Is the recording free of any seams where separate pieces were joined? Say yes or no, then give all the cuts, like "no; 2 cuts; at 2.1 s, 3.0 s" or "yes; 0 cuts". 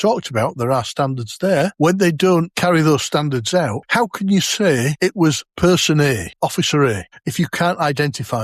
no; 6 cuts; at 1.7 s, 2.5 s, 3.8 s, 5.4 s, 6.3 s, 7.1 s